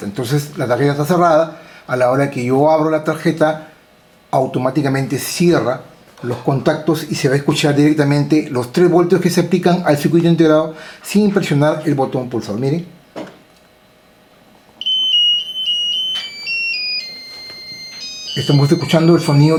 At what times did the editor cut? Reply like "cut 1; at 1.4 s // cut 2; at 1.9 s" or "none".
none